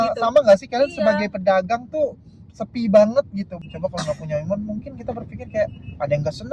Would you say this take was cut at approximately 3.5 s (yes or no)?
yes